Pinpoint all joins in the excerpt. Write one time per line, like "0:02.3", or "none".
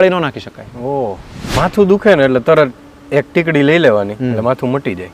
0:01.6